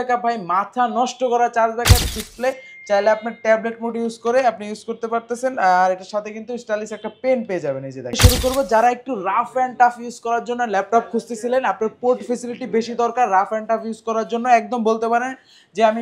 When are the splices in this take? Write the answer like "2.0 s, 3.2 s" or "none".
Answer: 2.0 s, 8.2 s